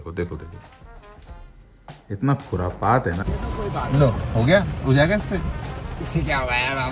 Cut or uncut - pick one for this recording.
cut